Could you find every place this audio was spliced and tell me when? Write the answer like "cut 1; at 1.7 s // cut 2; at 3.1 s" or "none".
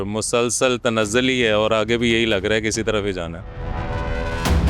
cut 1; at 3.5 s

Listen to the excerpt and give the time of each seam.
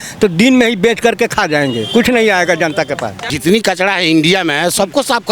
cut 1; at 3.2 s

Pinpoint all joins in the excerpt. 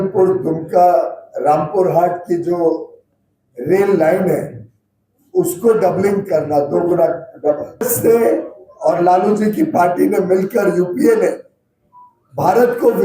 cut 1; at 7.9 s

